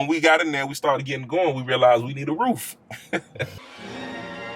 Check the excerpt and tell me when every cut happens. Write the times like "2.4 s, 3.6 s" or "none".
3.4 s